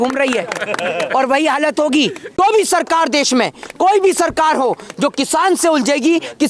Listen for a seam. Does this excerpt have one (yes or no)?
yes